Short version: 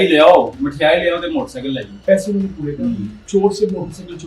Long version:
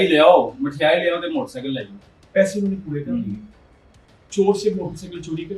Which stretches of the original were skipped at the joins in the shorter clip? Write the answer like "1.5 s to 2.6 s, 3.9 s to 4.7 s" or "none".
1.9 s to 2.2 s, 3.4 s to 4.2 s